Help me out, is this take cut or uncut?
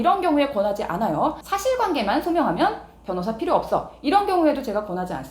cut